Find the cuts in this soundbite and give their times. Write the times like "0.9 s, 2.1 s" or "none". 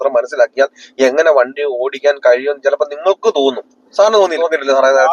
3.7 s, 4.3 s